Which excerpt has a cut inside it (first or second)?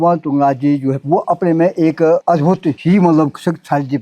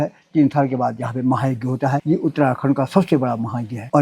first